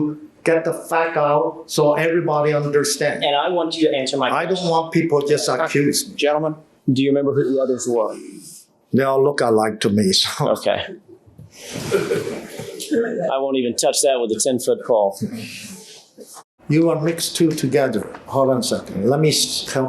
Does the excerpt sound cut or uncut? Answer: cut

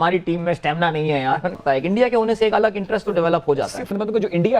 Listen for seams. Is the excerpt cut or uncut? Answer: cut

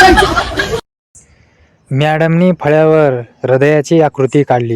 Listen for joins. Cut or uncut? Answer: cut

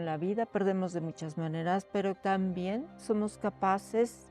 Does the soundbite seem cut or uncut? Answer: cut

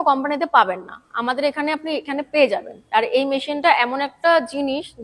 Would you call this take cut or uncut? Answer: uncut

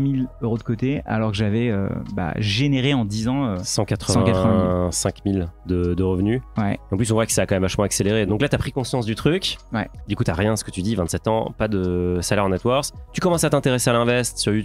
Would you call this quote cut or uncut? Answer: uncut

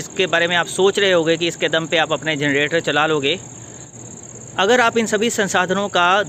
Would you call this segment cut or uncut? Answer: uncut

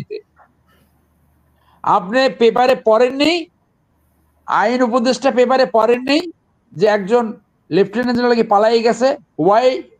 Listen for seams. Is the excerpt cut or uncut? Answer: uncut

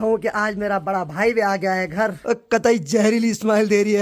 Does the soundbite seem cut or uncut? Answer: cut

